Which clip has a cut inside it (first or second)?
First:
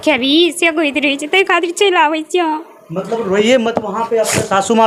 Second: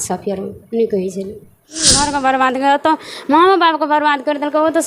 second